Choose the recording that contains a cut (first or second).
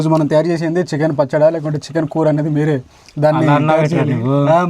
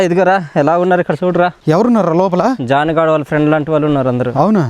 second